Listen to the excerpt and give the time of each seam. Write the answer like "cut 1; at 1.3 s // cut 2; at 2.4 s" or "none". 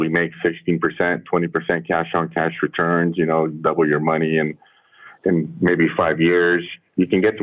none